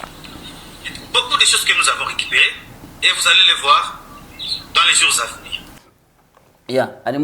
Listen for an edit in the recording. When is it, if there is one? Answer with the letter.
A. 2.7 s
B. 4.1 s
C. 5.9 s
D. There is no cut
C